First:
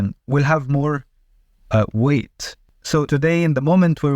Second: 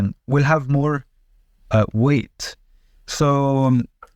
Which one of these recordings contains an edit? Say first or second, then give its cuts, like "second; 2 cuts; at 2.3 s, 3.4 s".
first; 1 cut; at 3.0 s